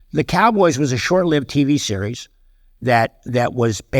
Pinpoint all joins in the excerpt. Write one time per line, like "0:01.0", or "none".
none